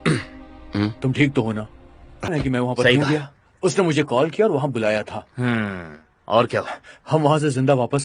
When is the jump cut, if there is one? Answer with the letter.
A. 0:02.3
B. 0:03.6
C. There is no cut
A